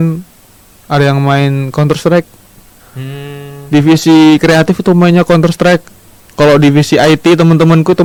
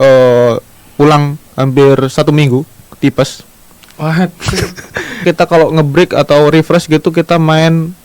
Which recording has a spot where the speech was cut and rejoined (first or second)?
second